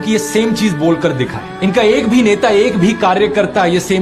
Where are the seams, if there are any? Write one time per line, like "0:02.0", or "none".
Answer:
0:01.5